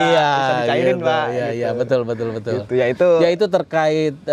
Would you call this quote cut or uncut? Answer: uncut